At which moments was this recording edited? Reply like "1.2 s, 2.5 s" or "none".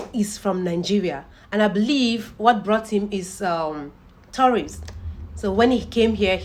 none